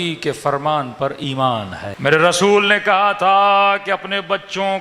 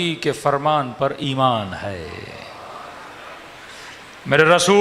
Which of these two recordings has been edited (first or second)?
first